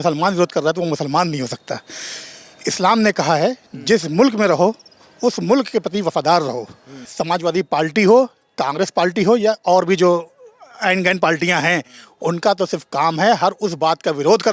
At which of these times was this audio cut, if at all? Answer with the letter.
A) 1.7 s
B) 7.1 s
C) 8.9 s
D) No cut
B